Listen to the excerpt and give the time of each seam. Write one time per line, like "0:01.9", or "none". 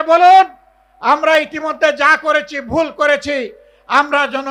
none